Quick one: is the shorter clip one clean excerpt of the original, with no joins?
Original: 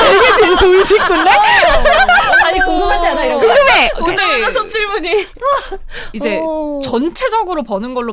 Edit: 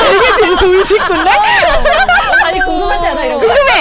yes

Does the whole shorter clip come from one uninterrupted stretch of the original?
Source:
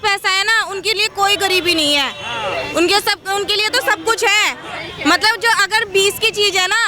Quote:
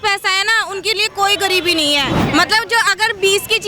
no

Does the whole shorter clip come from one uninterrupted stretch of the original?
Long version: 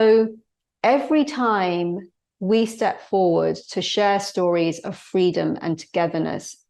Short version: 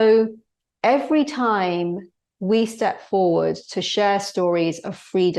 yes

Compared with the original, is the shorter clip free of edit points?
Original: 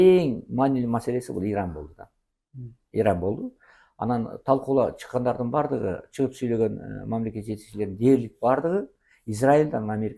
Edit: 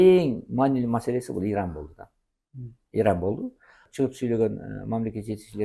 no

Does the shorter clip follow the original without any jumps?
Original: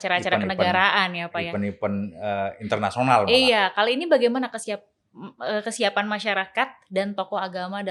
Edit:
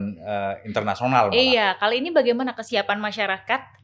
no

